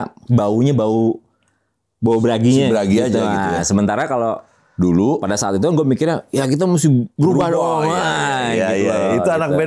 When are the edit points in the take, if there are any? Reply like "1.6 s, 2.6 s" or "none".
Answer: none